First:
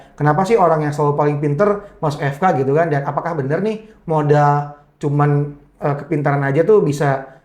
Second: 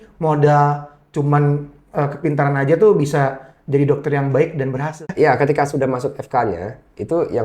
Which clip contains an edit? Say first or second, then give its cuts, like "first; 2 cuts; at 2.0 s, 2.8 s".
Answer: second; 1 cut; at 5.0 s